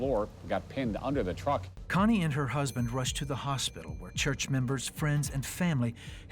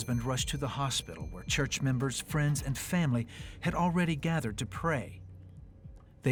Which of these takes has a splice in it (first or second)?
first